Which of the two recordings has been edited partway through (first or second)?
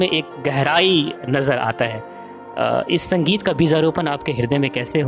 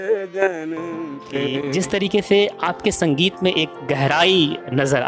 second